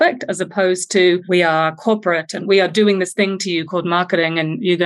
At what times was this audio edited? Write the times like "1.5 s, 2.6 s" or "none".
1.2 s, 2.4 s